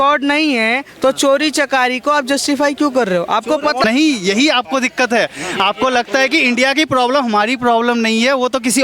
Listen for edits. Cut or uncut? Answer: cut